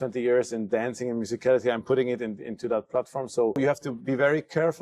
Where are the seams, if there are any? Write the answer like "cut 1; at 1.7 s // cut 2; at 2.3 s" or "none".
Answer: cut 1; at 3.6 s